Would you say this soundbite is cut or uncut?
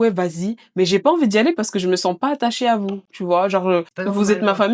uncut